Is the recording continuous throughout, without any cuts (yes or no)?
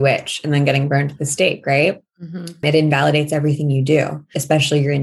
no